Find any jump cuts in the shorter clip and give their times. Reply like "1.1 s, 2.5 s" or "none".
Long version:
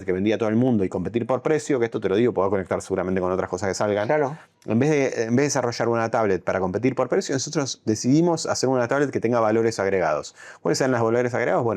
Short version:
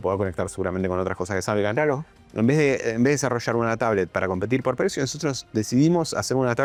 none